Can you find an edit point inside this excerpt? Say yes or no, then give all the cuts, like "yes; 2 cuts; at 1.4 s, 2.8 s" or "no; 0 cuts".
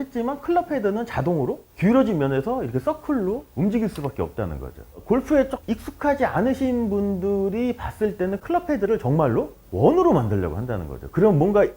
yes; 1 cut; at 8.4 s